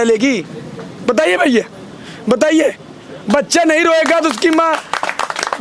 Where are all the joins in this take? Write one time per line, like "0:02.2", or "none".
none